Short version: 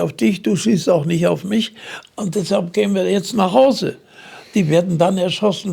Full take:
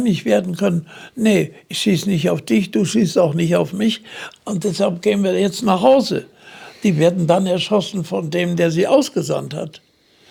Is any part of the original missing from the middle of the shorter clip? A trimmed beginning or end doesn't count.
no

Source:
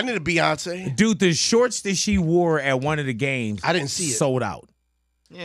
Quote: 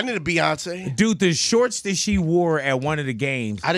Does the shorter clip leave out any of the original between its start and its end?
no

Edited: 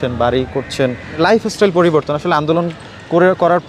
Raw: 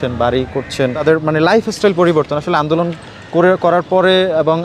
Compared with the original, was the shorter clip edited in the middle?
yes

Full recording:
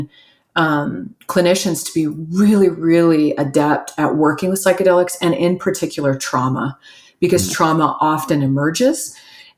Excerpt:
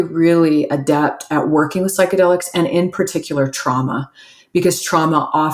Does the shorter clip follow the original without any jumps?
yes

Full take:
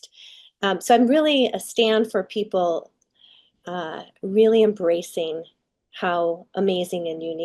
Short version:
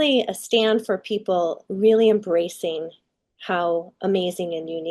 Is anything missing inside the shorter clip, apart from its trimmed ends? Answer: yes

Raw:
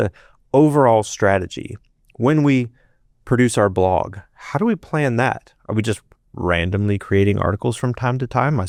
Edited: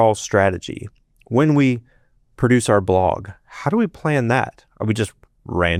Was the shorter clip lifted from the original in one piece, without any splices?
yes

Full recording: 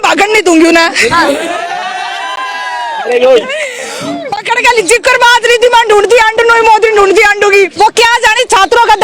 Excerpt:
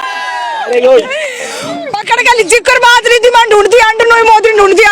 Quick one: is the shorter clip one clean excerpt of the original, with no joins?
yes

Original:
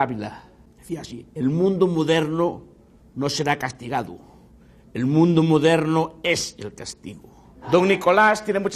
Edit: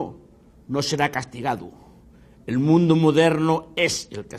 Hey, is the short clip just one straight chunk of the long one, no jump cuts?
yes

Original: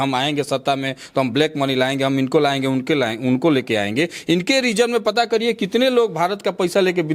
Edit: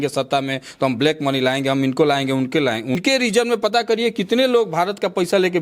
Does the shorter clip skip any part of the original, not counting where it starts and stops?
yes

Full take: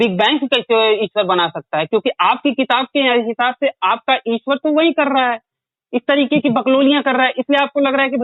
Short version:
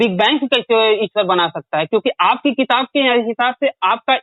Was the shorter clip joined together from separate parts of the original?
no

